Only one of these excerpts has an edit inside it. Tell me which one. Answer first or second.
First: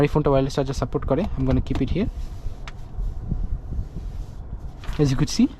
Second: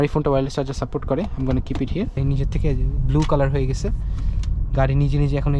second